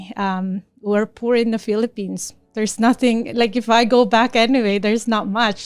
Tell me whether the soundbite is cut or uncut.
uncut